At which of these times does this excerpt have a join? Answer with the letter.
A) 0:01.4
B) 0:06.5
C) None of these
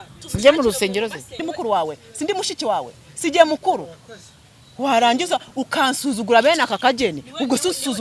A